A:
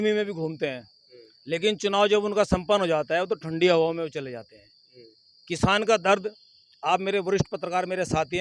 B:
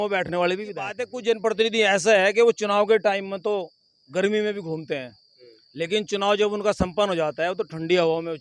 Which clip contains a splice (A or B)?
B